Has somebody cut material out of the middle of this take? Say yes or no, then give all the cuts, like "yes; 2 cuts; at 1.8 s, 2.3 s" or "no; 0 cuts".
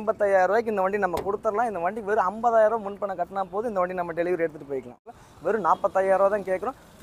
yes; 1 cut; at 5.1 s